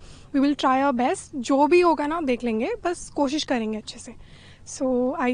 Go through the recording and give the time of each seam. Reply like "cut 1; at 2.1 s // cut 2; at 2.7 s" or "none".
none